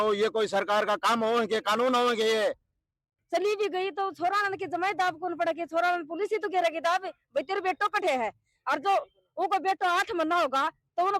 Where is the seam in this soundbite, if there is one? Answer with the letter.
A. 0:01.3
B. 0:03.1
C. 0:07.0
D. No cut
B